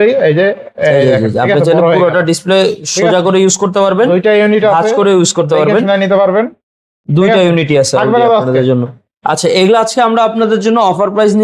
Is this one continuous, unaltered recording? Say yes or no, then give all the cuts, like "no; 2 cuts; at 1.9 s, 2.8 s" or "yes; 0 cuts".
yes; 0 cuts